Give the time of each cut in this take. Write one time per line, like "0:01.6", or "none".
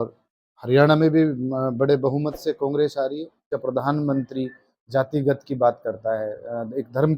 0:03.5

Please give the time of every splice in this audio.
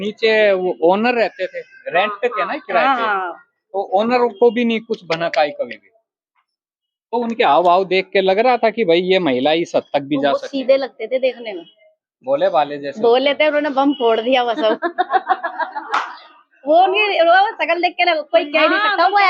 none

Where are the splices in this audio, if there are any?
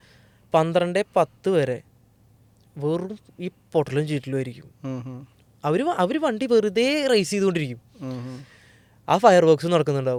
none

